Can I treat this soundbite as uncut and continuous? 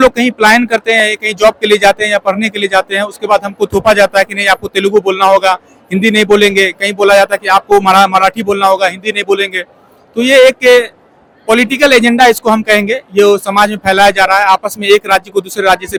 yes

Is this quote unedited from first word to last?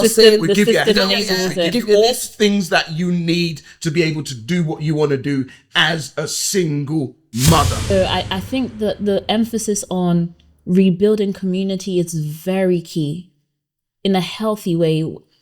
no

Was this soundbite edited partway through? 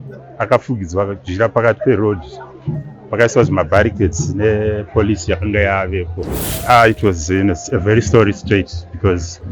yes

